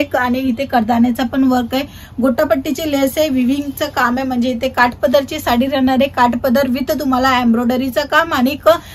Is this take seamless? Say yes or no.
yes